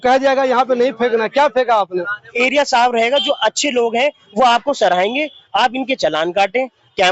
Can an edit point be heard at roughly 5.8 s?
no; 1 cut; at 2.2 s

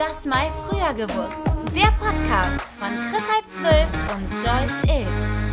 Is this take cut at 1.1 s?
no; 0 cuts

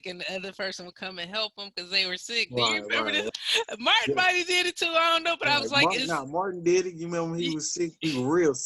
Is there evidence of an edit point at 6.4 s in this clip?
no; 1 cut; at 3.3 s

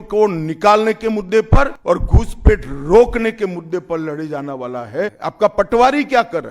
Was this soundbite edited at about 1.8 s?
yes; 2 cuts; at 1.8 s, 5.2 s

